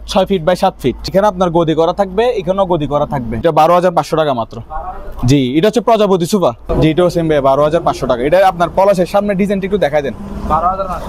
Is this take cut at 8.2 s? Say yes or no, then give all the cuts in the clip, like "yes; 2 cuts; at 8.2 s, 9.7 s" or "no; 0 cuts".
no; 3 cuts; at 1.1 s, 3.4 s, 6.6 s